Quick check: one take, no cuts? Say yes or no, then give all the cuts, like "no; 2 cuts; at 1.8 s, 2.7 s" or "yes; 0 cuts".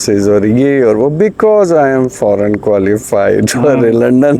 yes; 0 cuts